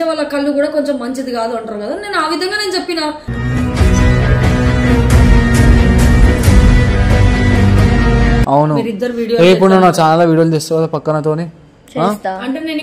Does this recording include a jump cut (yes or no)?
yes